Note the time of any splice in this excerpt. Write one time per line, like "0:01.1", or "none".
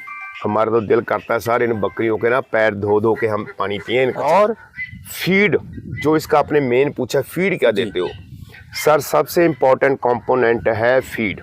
0:04.2